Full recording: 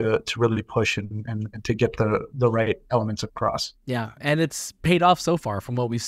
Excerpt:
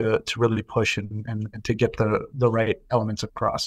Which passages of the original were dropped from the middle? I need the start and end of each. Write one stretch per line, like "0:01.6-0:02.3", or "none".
none